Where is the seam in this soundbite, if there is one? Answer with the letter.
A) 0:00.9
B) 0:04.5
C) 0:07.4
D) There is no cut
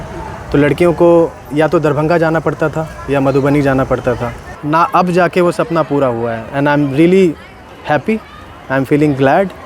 B